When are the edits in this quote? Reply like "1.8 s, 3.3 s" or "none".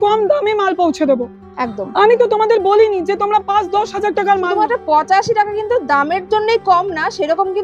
4.6 s